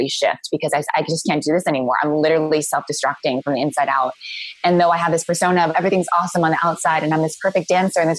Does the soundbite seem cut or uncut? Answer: uncut